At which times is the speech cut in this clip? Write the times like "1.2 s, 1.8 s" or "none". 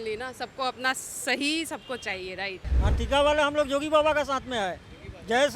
2.7 s